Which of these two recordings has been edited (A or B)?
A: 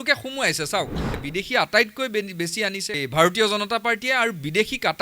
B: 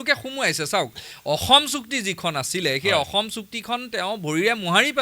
A